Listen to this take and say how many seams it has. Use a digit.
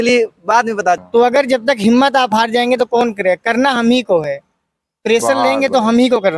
1